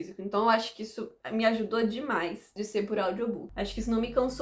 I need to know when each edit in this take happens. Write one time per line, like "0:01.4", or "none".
none